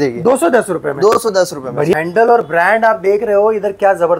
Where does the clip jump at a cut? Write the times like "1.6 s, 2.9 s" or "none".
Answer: 1.9 s